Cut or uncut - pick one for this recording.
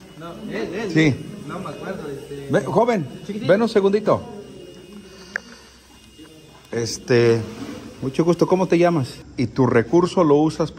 cut